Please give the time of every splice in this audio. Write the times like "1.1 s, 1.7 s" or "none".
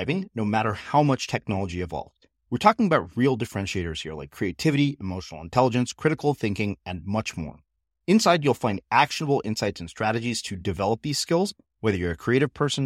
none

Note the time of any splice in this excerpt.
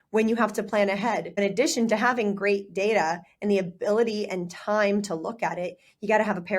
1.4 s

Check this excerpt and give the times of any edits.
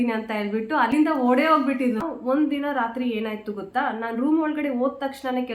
0.9 s, 2.1 s

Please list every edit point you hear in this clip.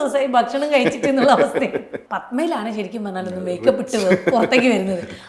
2.0 s

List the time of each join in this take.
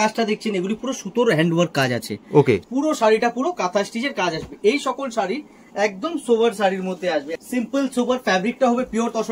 2.6 s, 7.3 s

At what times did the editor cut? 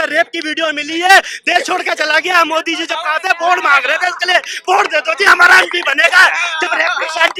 none

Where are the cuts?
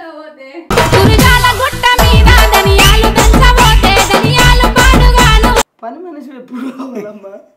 5.8 s

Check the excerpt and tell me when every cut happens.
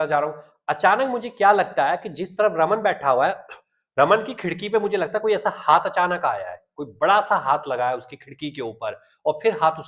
none

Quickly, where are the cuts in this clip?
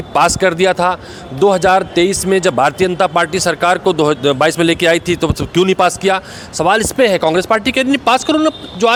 none

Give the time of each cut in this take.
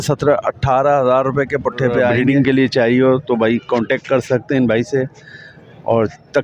2.2 s

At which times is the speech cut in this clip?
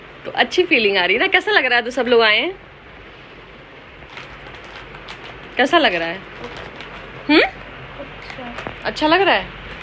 none

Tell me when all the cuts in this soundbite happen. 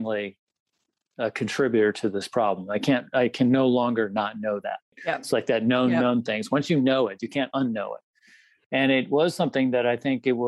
none

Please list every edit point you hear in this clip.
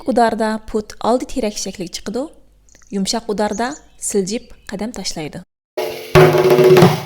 5.9 s

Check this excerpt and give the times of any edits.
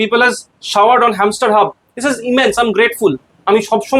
none

